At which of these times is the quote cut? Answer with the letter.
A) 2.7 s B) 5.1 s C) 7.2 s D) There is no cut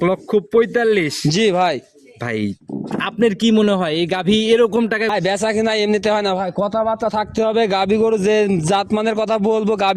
B